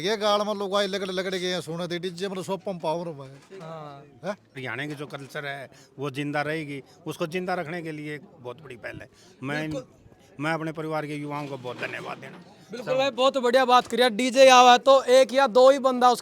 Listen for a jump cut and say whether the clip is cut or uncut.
cut